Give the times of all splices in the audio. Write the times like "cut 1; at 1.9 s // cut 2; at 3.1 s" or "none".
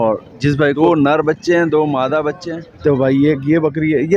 cut 1; at 0.8 s // cut 2; at 2.5 s